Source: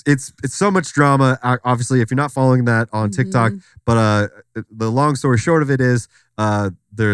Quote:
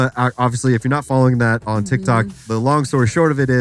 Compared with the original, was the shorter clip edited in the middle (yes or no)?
yes